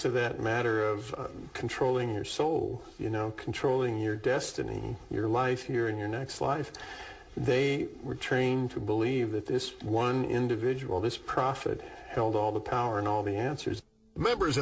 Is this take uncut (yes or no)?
yes